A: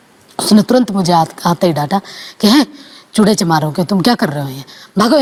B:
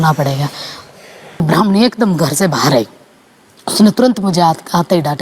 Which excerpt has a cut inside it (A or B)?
B